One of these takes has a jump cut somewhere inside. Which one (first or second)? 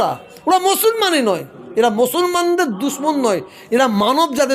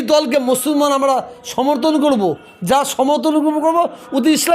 first